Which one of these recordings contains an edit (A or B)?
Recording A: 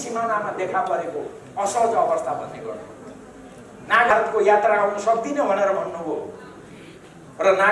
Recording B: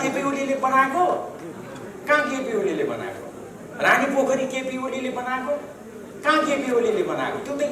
A